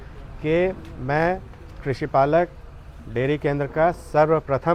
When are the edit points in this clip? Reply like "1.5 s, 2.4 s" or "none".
none